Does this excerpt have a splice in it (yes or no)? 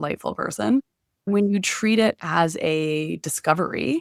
yes